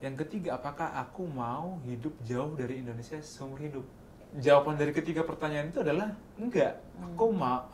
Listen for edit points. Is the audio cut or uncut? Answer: cut